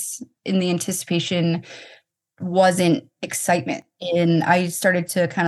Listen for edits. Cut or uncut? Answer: cut